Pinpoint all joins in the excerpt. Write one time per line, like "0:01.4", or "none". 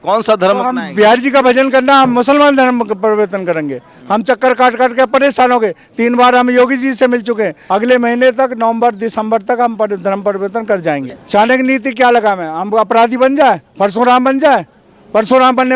0:04.0
0:07.6
0:11.1

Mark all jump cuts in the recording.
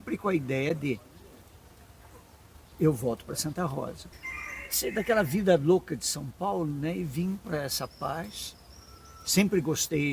0:04.0

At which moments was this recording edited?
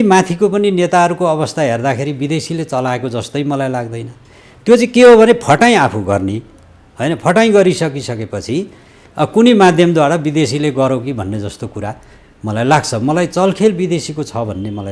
none

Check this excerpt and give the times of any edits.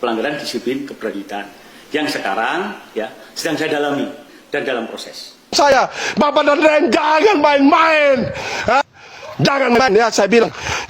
0:05.5

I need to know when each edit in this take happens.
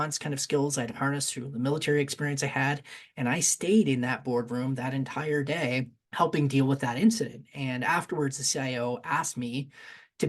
0:06.0

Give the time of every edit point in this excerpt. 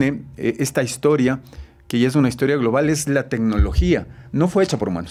none

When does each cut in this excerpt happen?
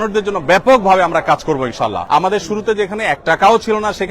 0:02.0

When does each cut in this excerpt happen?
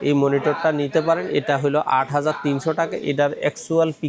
none

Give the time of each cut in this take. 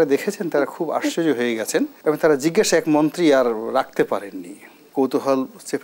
0:01.9
0:04.9

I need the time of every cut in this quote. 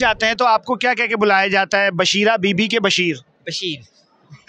none

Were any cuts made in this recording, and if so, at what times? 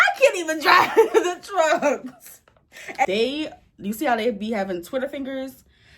0:03.1

